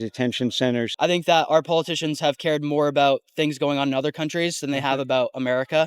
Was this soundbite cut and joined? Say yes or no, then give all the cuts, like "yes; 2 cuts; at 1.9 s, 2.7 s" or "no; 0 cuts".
yes; 1 cut; at 0.9 s